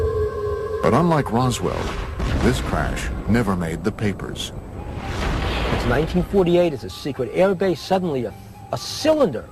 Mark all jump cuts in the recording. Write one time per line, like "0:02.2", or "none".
none